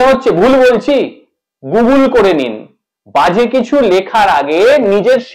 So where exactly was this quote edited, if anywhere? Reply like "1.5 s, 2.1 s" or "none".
none